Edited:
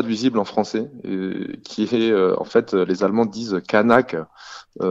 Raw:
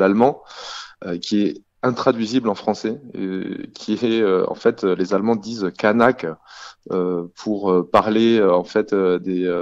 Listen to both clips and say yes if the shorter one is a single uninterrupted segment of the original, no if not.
yes